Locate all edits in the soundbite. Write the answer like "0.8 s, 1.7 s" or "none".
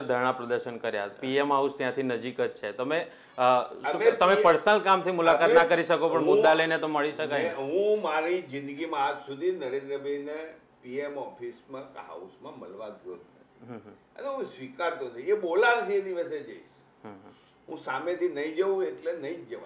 none

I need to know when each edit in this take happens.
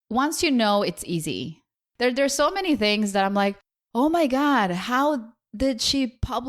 2.0 s

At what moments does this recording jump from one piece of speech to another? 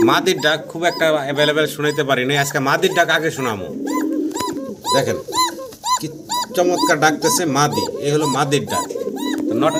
none

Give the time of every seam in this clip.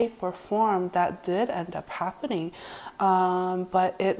none

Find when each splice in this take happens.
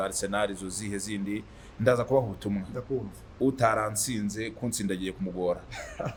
none

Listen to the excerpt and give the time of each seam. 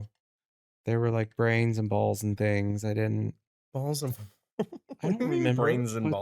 3.5 s

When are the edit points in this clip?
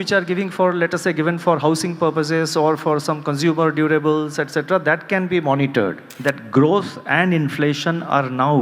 6.1 s

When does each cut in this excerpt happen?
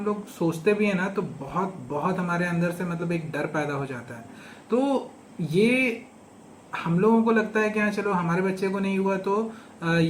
none

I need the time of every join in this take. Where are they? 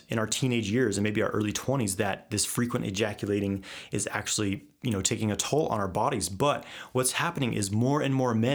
none

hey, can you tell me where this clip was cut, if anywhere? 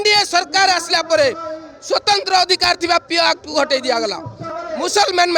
4.4 s

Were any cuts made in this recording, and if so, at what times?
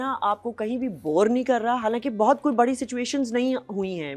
none

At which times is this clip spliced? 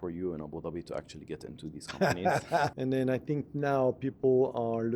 2.7 s

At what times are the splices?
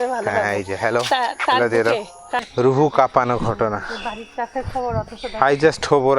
2.4 s

